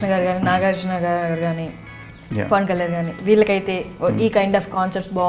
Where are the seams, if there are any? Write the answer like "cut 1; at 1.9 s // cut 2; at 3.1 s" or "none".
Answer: none